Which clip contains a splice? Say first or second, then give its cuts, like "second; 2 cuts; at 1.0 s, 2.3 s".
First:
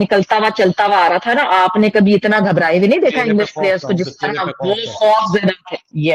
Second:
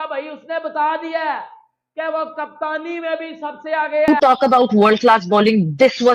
second; 1 cut; at 4.1 s